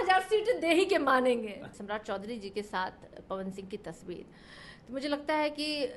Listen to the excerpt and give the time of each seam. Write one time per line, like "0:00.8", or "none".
0:01.6